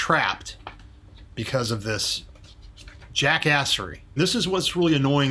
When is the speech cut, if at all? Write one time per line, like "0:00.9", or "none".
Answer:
0:04.2